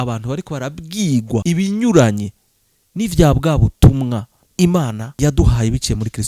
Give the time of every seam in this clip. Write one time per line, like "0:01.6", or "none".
0:01.4
0:04.4
0:05.0